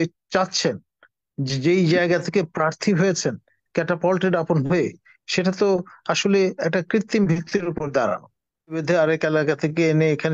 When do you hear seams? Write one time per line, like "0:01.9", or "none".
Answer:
0:08.8